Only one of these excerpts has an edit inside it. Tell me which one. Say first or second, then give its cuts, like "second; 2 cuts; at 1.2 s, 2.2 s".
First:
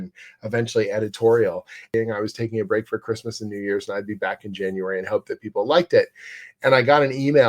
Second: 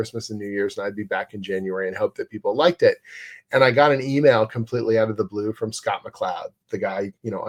first; 1 cut; at 1.9 s